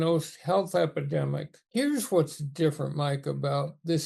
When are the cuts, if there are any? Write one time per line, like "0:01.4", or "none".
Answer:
0:01.5